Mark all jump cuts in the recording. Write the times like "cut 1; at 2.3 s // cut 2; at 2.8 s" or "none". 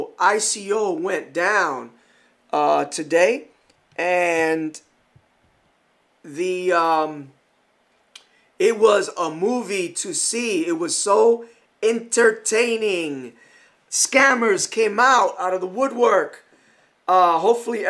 cut 1; at 8.9 s